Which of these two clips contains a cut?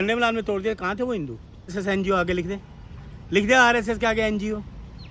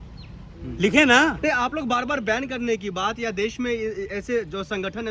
first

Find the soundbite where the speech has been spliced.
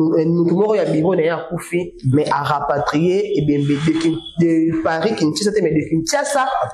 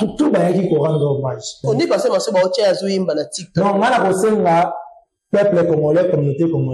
second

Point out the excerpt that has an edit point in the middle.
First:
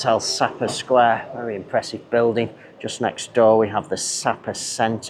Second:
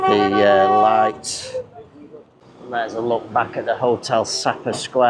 second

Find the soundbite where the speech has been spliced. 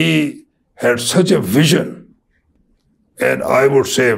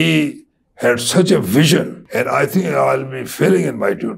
second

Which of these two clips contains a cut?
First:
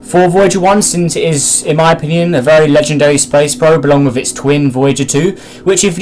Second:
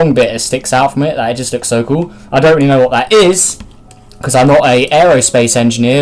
second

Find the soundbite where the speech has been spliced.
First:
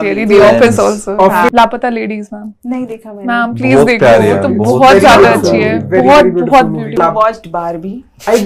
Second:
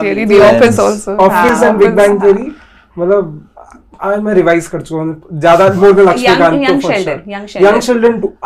first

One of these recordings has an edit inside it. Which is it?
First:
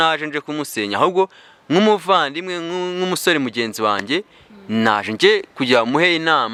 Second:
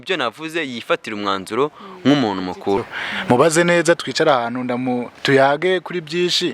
second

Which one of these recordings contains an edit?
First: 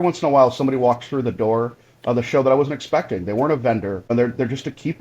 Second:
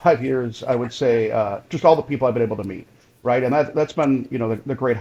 first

